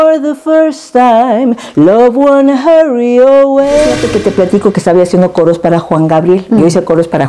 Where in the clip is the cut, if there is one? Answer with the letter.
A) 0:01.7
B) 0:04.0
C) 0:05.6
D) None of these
B